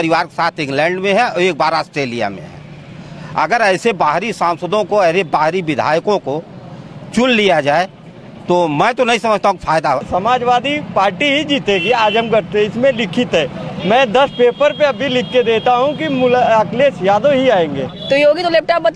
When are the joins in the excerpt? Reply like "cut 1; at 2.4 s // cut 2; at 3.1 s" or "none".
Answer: cut 1; at 10.1 s // cut 2; at 17.9 s